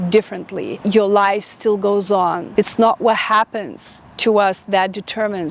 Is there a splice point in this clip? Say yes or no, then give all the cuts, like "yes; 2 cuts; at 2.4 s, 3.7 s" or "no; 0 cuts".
yes; 2 cuts; at 0.8 s, 2.4 s